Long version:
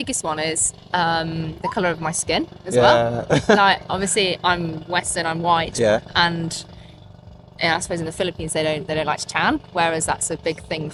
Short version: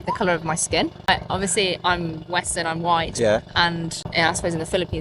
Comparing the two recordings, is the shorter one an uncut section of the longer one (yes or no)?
no